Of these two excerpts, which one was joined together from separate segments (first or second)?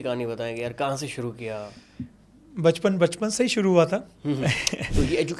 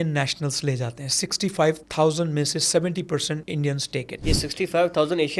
second